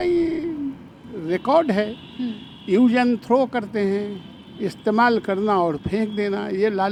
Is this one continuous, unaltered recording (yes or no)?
yes